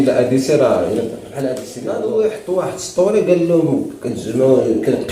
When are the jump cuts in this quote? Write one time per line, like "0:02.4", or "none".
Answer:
0:01.7